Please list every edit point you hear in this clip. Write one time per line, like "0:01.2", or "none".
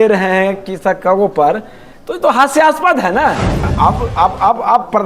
0:03.7